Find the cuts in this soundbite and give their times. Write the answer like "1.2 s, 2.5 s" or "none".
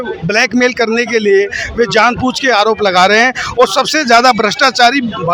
none